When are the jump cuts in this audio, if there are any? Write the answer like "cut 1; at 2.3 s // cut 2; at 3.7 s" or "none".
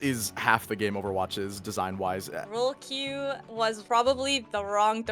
cut 1; at 2.4 s // cut 2; at 3.6 s

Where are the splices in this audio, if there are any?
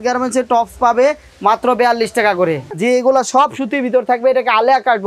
cut 1; at 2.8 s

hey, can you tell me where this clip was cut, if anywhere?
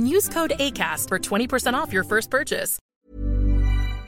cut 1; at 2.7 s

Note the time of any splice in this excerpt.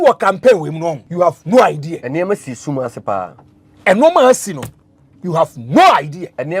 cut 1; at 1.0 s // cut 2; at 2.0 s

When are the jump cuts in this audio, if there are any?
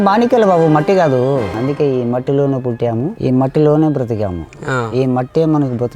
cut 1; at 1.5 s // cut 2; at 3.1 s

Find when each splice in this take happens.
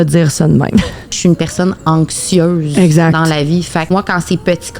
cut 1; at 1.1 s // cut 2; at 3.8 s

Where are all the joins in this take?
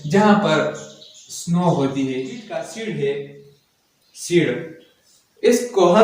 cut 1; at 2.7 s

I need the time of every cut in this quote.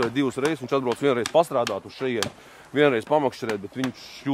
none

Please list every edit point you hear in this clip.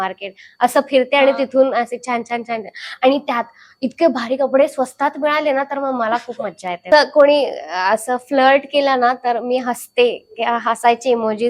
cut 1; at 6.9 s

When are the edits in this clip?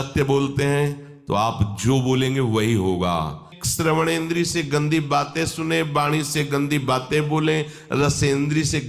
cut 1; at 3.6 s

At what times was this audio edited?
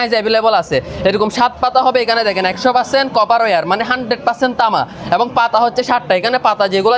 none

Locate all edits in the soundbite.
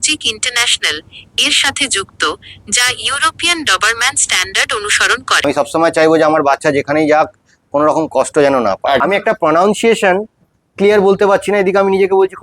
cut 1; at 5.4 s // cut 2; at 9.0 s

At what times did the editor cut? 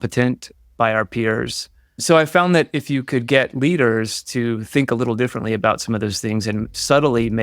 cut 1; at 1.8 s

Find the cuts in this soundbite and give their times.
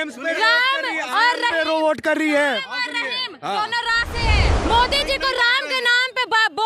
cut 1; at 4.5 s

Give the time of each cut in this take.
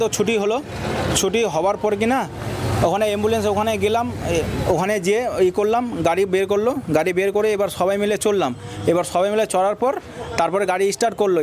cut 1; at 3.1 s

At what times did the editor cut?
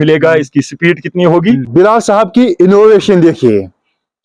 cut 1; at 1.7 s

